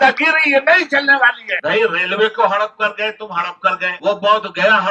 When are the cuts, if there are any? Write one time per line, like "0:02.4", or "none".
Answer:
0:01.5
0:03.9